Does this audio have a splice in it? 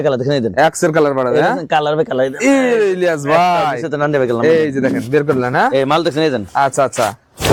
no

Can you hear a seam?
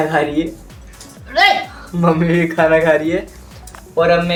no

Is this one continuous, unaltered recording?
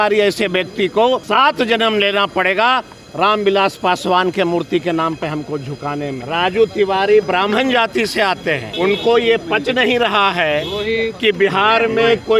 no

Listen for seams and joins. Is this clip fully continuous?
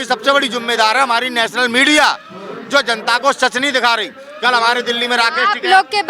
yes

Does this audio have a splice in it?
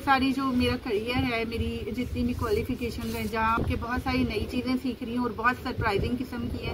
yes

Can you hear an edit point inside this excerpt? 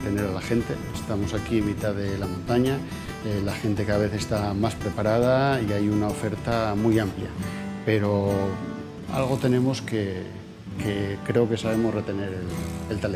no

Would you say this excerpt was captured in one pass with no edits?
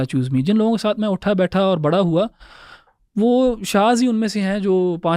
yes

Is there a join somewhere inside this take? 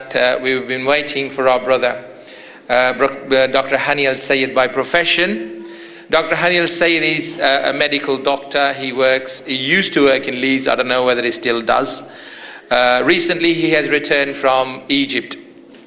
no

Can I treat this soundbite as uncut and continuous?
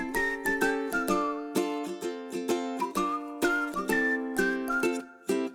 yes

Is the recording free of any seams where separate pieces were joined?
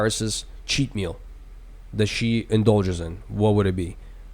yes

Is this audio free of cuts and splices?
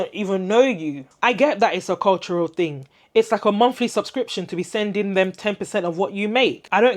no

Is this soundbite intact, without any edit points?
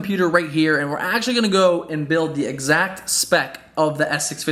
yes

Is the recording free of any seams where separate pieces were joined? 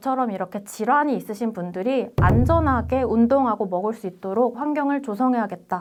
yes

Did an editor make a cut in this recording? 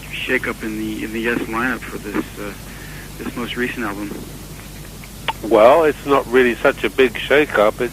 yes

